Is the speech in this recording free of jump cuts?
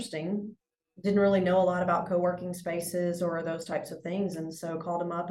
yes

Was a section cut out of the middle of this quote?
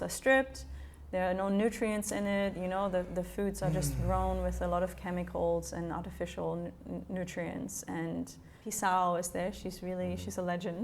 yes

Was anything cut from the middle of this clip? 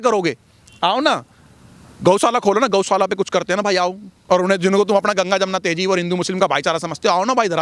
yes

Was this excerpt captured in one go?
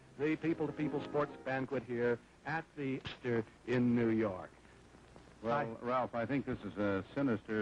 no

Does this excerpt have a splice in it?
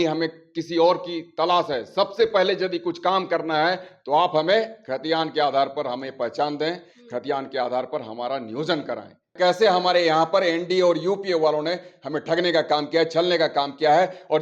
yes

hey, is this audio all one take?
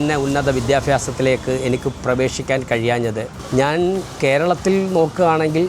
no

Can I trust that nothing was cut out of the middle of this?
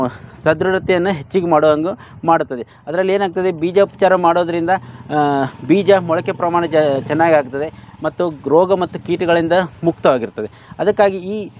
yes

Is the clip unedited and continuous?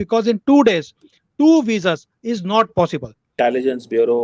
no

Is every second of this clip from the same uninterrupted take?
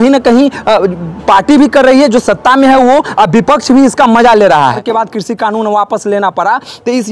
no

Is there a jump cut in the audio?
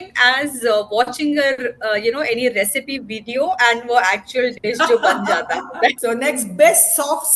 yes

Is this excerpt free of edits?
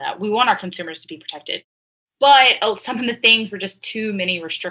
no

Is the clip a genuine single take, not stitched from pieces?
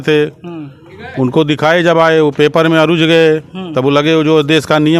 yes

